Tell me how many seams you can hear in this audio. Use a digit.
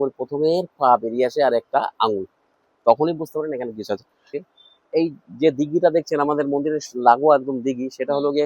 1